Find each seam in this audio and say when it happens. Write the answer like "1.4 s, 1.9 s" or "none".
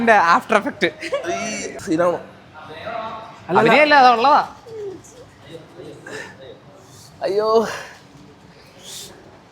1.7 s